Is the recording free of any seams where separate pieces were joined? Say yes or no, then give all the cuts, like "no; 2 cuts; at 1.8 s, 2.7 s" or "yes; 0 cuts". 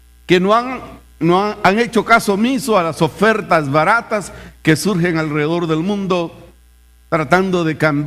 no; 1 cut; at 4.3 s